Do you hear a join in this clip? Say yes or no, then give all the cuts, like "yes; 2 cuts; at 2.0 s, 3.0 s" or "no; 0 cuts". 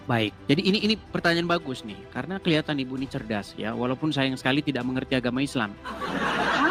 no; 0 cuts